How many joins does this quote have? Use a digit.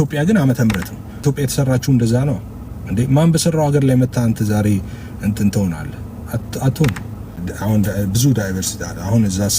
2